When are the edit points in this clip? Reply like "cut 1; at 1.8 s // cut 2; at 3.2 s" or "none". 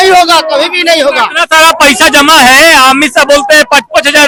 none